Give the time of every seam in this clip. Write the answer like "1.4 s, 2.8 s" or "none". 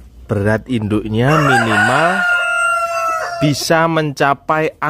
none